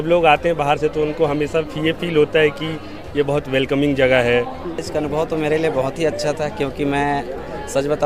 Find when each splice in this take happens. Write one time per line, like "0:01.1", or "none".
0:04.8